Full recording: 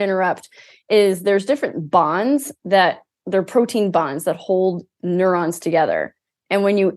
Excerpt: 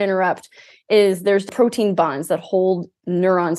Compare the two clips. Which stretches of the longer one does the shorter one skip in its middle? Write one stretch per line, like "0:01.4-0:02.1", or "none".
0:01.5-0:03.4